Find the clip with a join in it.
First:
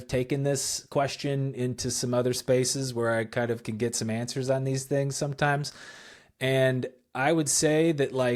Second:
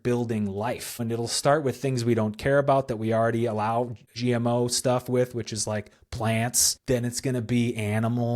second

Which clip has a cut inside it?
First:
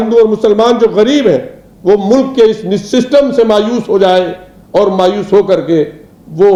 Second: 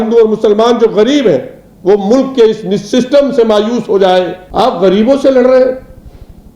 second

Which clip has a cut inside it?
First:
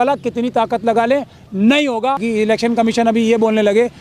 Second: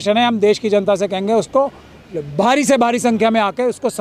first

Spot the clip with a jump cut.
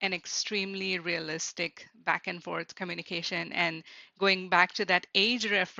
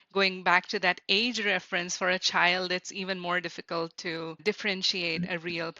second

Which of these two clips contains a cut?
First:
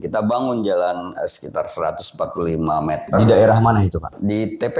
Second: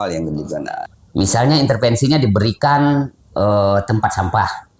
second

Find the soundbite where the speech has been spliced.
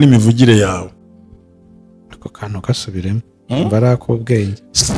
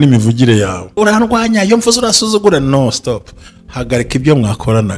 second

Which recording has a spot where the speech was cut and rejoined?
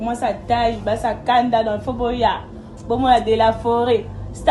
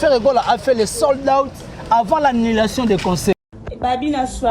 second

